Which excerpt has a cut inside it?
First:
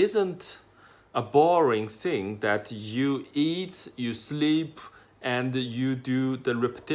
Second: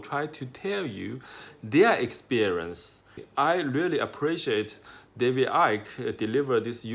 second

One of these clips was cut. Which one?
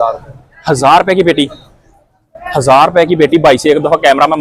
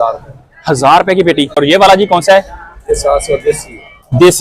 second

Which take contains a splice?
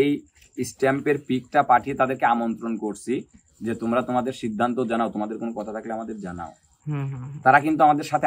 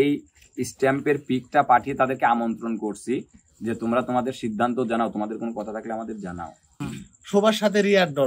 second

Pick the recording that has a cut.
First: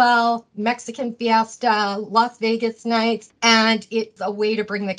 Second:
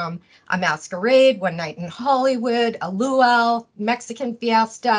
first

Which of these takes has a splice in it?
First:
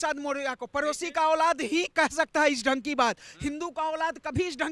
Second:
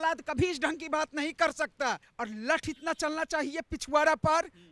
second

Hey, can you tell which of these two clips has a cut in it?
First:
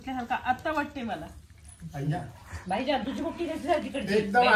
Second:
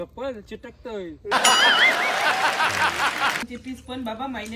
second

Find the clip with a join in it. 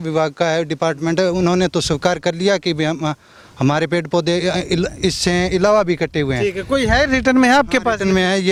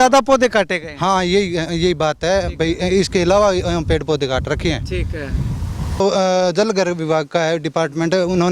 second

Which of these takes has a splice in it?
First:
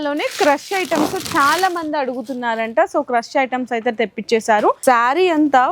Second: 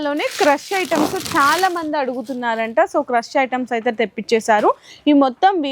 first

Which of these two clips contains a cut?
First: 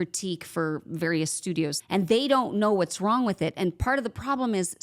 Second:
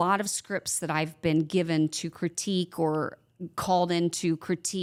first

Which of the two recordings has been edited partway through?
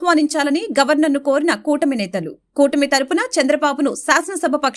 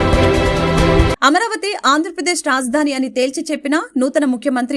second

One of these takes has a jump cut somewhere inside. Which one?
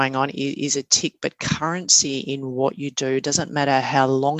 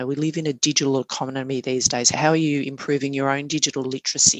second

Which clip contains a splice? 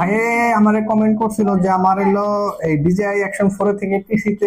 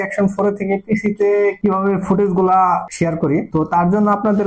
second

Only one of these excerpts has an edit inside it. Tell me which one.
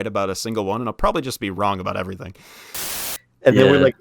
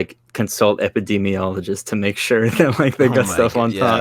first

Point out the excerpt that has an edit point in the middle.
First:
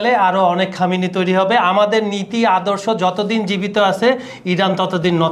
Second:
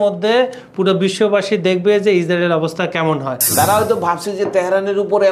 second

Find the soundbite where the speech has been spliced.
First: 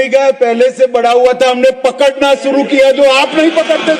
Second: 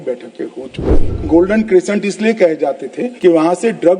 second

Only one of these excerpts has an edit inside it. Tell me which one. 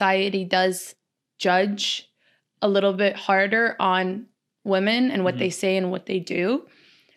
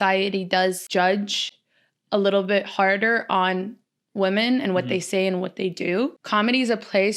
second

